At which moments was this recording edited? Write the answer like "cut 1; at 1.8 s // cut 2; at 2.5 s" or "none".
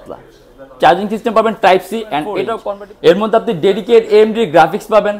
cut 1; at 2.5 s

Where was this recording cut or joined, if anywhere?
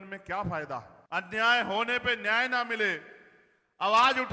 cut 1; at 1.0 s

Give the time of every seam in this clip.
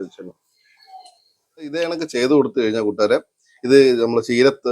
cut 1; at 1.7 s

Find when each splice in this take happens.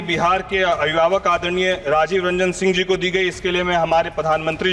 none

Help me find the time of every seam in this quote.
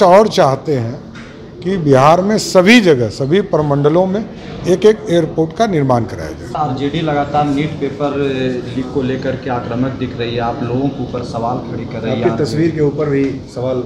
cut 1; at 6.4 s

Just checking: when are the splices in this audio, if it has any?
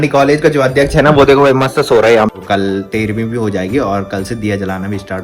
cut 1; at 2.3 s

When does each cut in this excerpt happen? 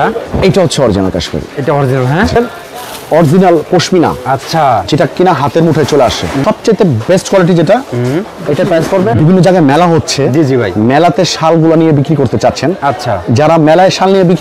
cut 1; at 2.4 s // cut 2; at 6.4 s // cut 3; at 9.1 s

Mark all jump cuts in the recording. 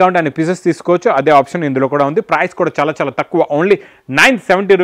none

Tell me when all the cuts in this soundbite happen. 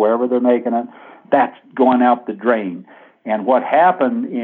cut 1; at 1.2 s

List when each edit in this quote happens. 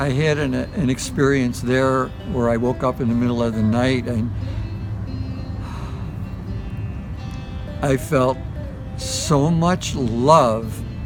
none

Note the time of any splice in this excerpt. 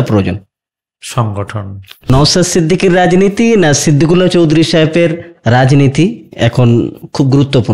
cut 1; at 2.1 s

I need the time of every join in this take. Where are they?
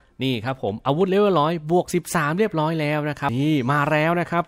cut 1; at 3.3 s

